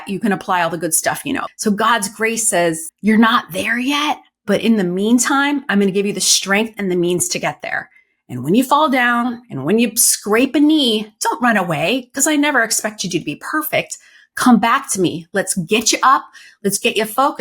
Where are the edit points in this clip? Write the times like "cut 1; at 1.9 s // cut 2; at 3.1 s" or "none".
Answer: cut 1; at 1.5 s // cut 2; at 2.9 s